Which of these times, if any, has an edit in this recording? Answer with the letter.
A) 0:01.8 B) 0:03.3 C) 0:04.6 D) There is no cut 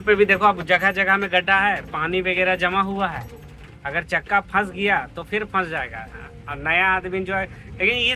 D